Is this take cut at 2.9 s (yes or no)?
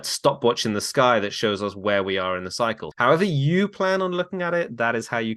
yes